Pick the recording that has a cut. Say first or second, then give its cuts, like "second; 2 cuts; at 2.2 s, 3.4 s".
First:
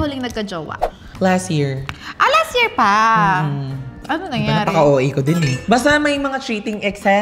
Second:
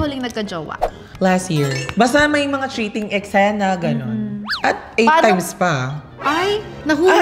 second; 2 cuts; at 1.8 s, 4.4 s